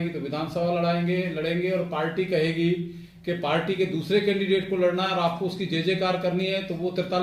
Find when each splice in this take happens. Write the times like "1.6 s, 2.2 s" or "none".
none